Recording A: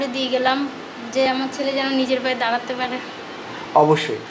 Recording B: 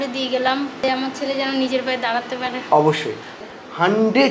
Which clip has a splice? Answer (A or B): B